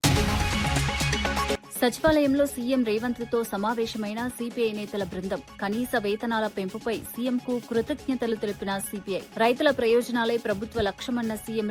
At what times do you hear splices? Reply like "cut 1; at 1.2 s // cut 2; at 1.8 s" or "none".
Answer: cut 1; at 1.5 s

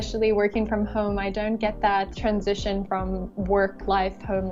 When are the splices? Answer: cut 1; at 2.1 s

